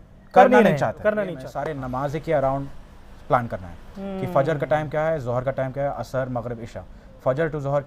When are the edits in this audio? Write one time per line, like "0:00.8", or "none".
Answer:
0:01.5